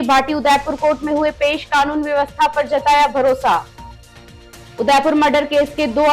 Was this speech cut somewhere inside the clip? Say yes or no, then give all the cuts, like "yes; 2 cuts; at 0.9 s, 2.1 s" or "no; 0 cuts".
no; 0 cuts